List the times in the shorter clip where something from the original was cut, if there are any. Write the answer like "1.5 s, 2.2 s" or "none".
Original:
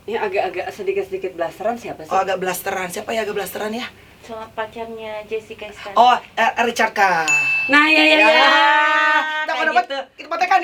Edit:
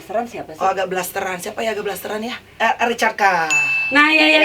2.5 s